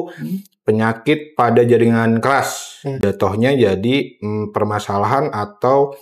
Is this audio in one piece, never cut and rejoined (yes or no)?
no